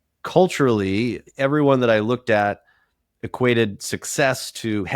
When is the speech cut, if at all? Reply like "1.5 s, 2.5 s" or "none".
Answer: 1.2 s